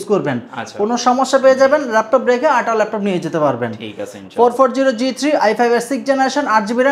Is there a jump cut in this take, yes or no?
no